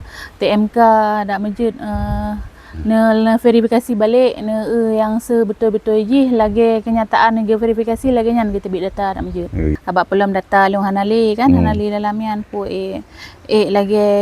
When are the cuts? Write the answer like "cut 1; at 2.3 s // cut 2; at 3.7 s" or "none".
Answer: cut 1; at 9.7 s